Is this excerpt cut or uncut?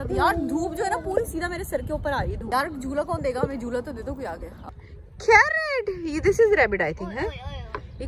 cut